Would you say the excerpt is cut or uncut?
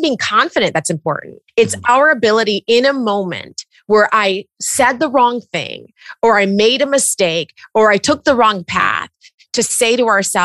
cut